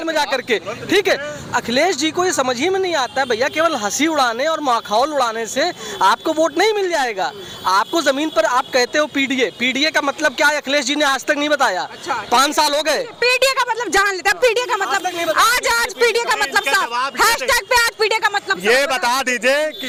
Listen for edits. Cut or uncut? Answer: uncut